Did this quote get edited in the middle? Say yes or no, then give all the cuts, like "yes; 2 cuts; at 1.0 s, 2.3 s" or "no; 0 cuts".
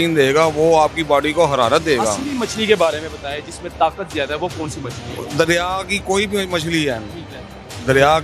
no; 0 cuts